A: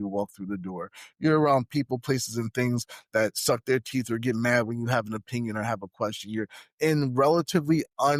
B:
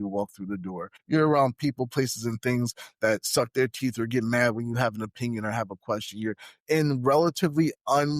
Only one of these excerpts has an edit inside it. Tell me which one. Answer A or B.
B